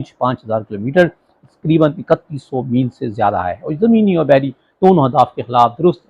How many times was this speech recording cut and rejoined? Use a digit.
0